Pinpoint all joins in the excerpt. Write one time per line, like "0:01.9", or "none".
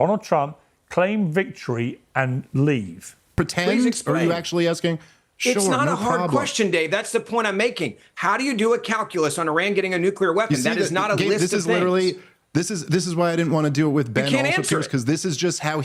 0:03.3